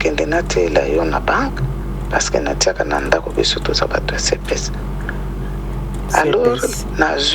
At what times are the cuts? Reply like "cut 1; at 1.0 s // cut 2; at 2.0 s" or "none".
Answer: none